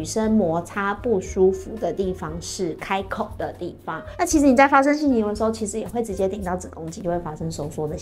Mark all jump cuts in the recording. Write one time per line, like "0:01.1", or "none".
0:04.0
0:07.0